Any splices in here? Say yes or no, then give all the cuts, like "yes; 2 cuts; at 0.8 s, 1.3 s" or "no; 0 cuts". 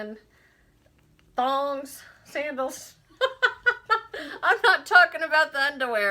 no; 0 cuts